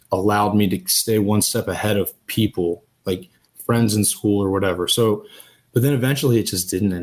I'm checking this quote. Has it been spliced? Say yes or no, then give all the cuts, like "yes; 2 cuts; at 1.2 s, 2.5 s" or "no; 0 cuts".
no; 0 cuts